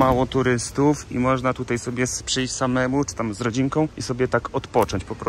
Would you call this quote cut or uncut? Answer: uncut